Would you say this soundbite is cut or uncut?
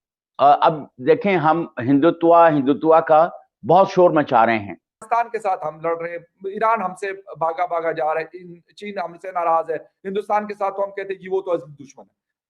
cut